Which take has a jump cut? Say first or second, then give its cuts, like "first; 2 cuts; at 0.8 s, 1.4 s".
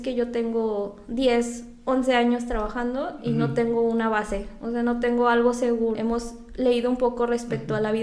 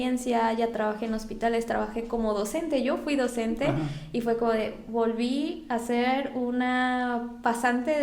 first; 1 cut; at 6.0 s